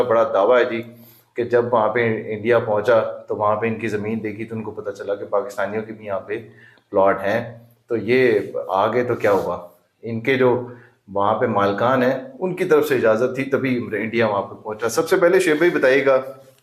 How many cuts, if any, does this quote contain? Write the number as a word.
zero